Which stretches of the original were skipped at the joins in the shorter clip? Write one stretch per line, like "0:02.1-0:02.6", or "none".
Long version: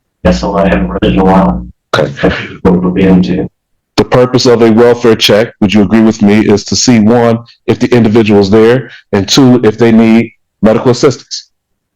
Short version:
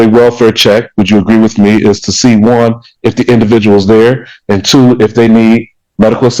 none